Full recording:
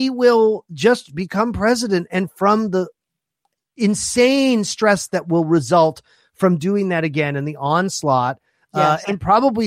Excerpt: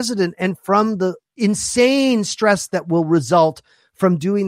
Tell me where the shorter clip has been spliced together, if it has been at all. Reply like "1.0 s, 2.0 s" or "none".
1.2 s

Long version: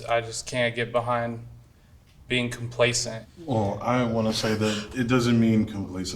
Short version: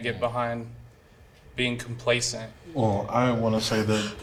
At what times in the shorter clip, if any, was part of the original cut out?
none

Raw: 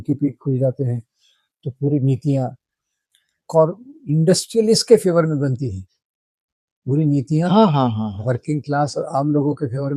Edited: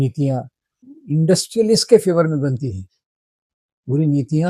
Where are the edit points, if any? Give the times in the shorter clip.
0.9 s

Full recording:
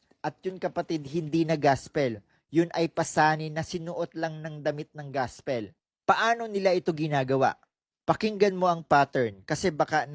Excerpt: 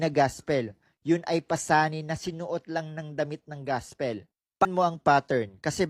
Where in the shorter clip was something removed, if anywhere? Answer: 4.7 s

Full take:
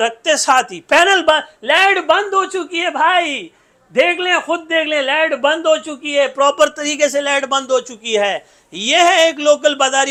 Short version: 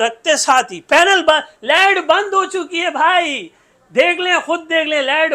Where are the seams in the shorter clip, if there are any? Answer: none

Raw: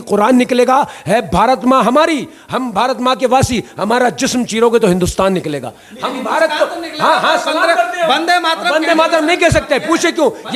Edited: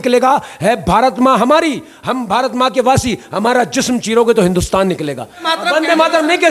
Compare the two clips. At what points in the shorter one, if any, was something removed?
5.5 s

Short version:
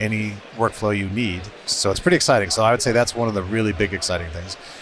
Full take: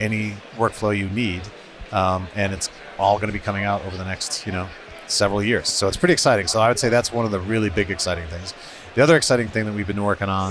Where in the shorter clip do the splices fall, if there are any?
1.7 s

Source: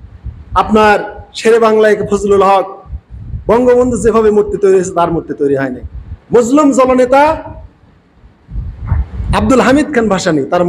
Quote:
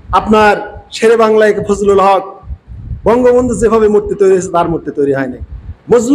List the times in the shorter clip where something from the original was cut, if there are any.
none

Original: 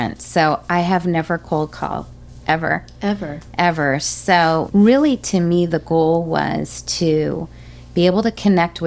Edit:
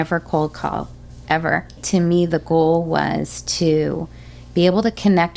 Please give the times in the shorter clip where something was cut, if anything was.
1.8 s

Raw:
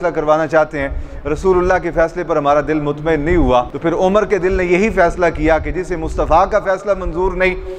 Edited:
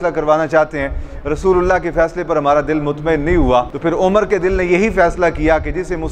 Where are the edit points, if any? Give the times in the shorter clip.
none

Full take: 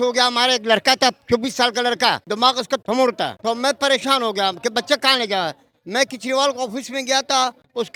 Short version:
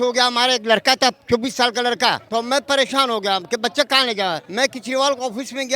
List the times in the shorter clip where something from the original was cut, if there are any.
2.2 s, 4.4 s

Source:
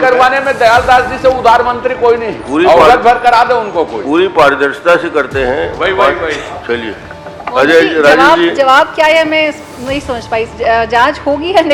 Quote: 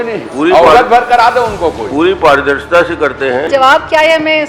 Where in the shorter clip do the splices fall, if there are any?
3.5 s

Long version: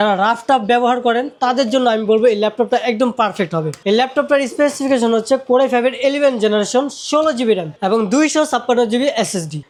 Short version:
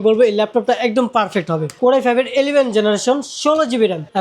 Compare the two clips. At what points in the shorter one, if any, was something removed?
1.8 s

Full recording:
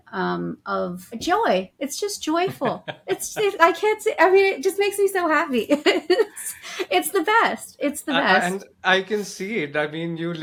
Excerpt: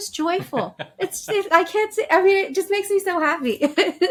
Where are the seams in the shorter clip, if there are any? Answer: none

